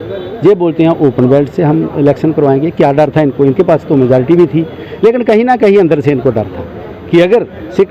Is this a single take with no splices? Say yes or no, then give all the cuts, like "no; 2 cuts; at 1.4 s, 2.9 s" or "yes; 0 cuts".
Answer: yes; 0 cuts